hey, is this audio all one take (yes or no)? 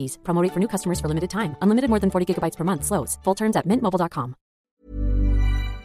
no